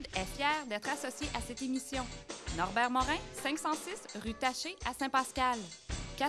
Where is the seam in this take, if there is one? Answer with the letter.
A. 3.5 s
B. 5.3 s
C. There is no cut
C